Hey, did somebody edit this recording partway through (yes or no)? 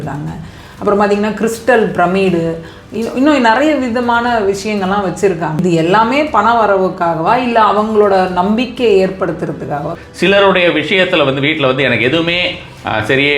yes